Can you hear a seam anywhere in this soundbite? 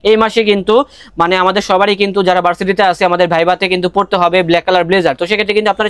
no; 0 cuts

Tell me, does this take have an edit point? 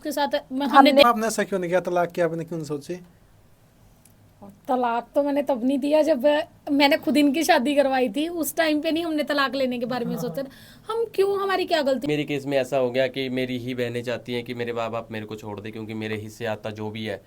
yes; 2 cuts; at 1.0 s, 12.1 s

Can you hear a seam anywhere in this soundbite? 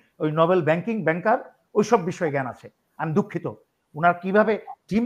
no; 0 cuts

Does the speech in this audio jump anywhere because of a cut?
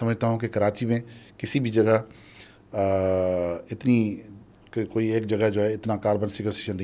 no; 0 cuts

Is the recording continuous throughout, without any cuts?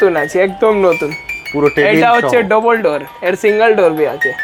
yes; 0 cuts

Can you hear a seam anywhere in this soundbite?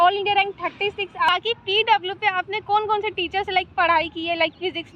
yes; 1 cut; at 1.3 s

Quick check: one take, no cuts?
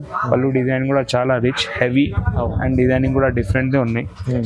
yes; 0 cuts

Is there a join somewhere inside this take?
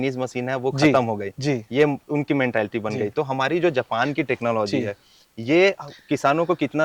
no; 0 cuts

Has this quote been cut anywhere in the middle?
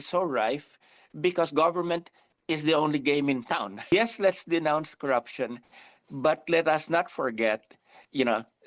no; 0 cuts

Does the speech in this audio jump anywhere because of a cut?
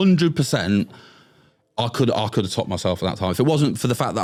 no; 0 cuts

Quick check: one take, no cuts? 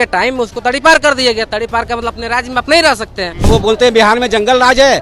no; 1 cut; at 3.4 s

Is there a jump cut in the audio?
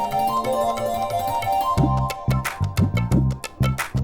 yes; 1 cut; at 1.8 s

